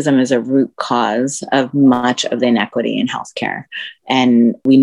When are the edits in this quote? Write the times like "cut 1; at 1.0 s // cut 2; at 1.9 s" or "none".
none